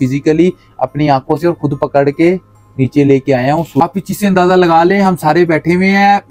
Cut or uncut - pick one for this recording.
cut